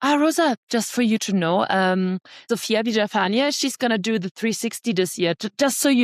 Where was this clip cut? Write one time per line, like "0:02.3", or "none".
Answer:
0:02.3